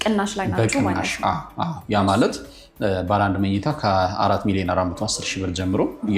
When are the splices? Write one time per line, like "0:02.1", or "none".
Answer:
none